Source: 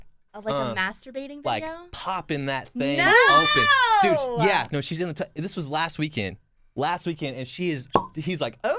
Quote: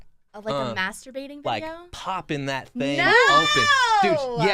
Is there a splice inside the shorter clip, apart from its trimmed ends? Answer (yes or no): no